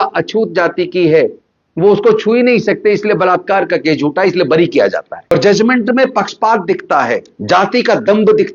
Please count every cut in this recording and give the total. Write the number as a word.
two